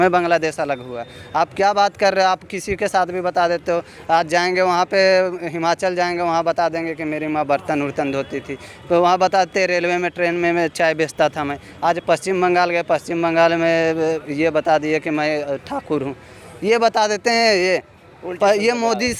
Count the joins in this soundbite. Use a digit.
0